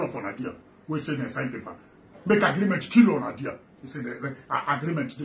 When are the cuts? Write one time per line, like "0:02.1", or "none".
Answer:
none